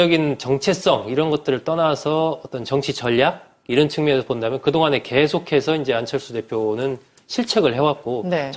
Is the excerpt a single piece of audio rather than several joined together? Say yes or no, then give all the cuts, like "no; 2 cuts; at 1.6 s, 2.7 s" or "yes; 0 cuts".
yes; 0 cuts